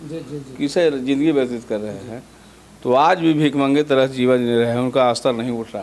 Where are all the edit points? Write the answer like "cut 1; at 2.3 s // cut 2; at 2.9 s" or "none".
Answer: none